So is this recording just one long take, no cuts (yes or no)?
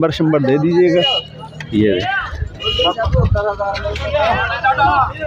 no